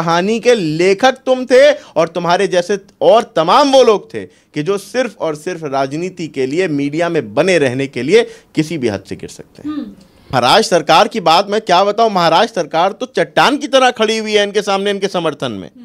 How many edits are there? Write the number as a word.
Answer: one